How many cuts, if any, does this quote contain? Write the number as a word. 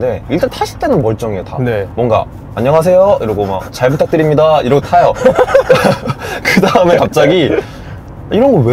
zero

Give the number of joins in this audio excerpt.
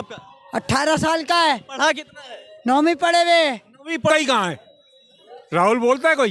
one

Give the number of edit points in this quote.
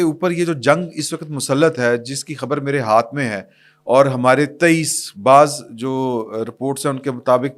zero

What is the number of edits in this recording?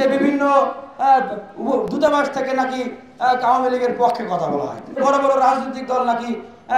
one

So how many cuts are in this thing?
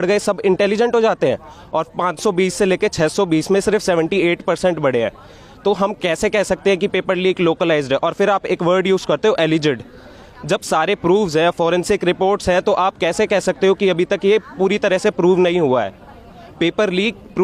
zero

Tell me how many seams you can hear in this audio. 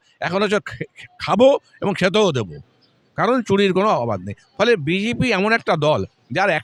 zero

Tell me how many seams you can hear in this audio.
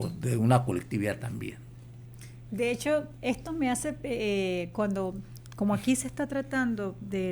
zero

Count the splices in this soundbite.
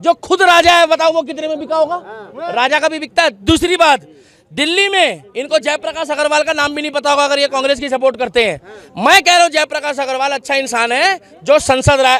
zero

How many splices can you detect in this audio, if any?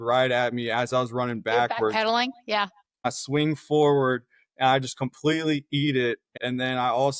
two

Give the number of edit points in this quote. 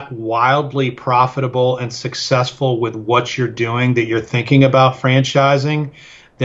zero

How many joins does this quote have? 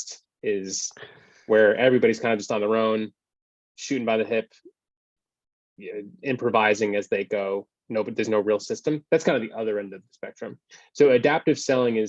zero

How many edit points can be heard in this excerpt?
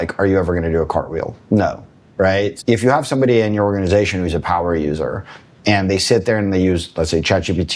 one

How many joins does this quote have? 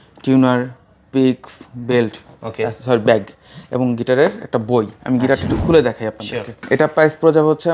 one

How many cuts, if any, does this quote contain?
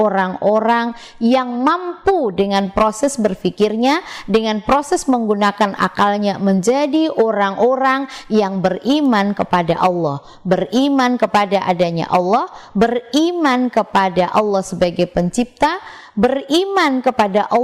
zero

